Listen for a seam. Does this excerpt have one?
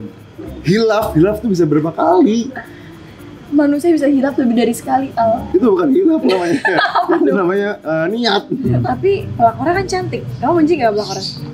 yes; 1 cut; at 8.7 s

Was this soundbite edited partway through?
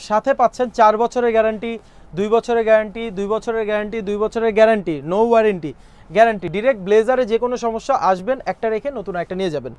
no; 0 cuts

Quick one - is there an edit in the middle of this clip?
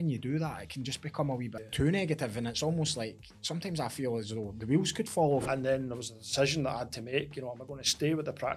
yes; 2 cuts; at 1.6 s, 5.4 s

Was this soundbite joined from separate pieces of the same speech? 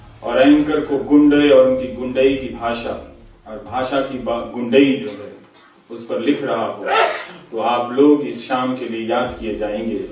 no; 0 cuts

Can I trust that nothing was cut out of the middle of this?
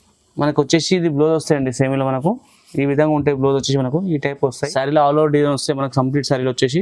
no; 1 cut; at 4.6 s

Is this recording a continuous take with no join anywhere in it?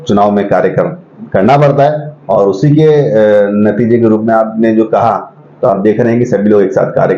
yes; 0 cuts

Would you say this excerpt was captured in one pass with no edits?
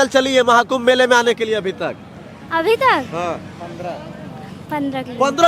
yes; 0 cuts

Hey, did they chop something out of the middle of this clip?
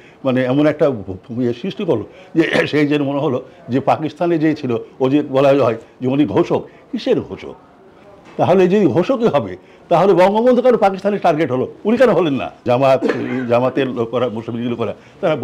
yes; 1 cut; at 12.6 s

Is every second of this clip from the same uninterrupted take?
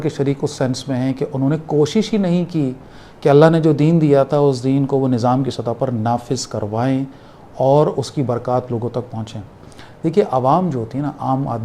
yes; 0 cuts

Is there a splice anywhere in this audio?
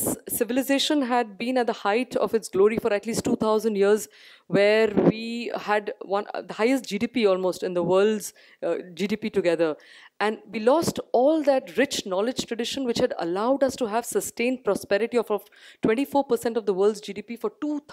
no; 0 cuts

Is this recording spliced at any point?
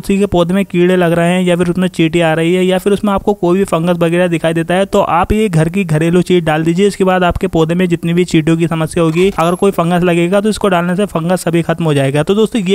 no; 0 cuts

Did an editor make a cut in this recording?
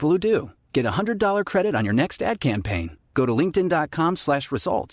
no; 0 cuts

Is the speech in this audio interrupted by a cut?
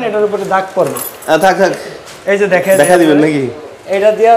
no; 0 cuts

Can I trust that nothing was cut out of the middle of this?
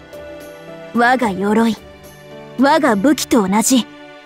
no; 1 cut; at 0.9 s

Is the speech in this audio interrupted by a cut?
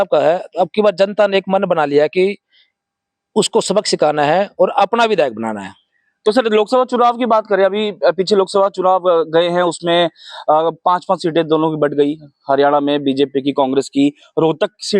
no; 0 cuts

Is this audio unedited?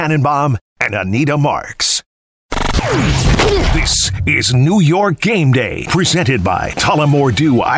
no; 1 cut; at 2.2 s

